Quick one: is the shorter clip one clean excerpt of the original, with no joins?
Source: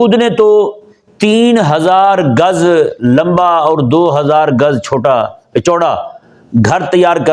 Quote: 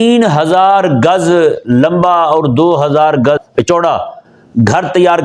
no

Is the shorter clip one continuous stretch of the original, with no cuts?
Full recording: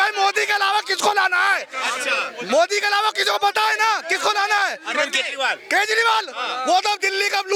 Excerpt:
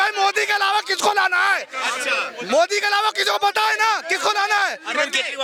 yes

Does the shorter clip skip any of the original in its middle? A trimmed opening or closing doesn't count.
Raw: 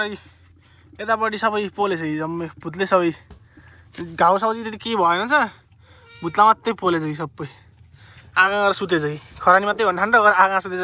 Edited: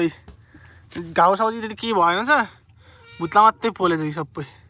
no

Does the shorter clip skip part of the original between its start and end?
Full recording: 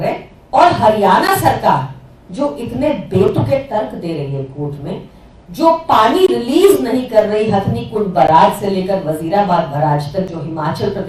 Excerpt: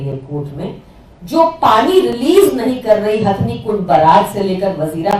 no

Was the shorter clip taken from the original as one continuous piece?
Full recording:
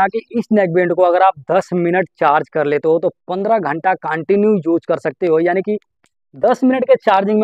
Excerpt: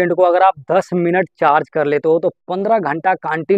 yes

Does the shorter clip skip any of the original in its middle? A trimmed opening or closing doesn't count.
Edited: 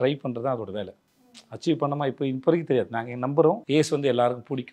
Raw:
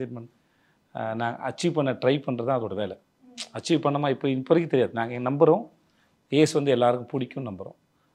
yes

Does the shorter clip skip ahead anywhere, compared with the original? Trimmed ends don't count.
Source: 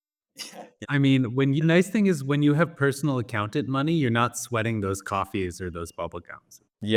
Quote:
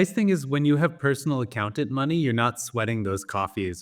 no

